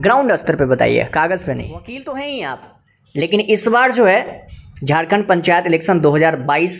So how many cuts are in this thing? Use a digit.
1